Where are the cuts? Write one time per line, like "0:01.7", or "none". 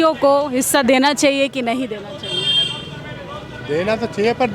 none

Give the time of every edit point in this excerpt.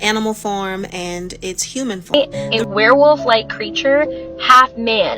0:02.1

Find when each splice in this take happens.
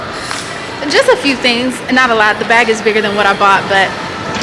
none

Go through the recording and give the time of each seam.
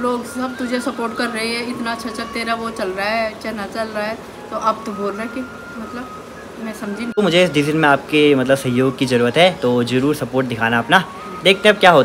0:07.2

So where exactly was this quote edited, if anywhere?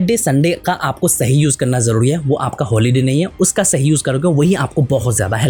none

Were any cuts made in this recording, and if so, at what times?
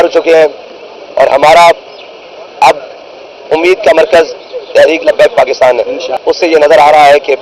0:05.9

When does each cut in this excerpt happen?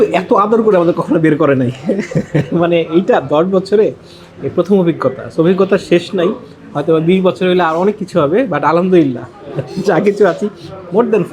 none

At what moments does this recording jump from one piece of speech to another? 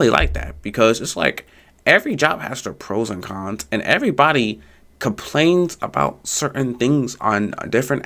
none

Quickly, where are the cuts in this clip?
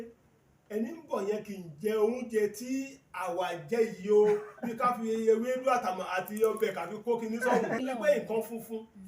0:07.8

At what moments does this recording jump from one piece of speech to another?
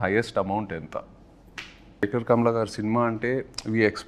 0:02.0

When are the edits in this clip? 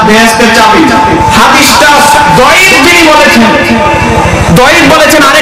0:01.2

